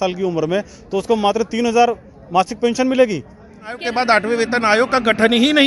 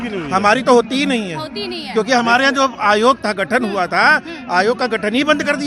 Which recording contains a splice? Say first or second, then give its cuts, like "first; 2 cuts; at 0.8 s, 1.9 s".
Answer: first; 1 cut; at 3.8 s